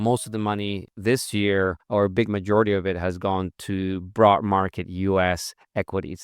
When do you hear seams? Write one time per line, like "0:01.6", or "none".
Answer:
0:00.9
0:01.8